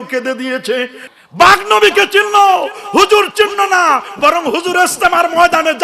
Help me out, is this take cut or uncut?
cut